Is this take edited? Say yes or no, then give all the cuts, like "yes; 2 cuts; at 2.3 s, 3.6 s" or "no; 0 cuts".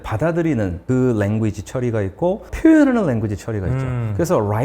yes; 2 cuts; at 0.8 s, 2.5 s